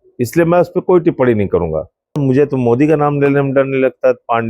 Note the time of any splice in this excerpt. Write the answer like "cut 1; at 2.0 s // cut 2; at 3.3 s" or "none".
cut 1; at 2.2 s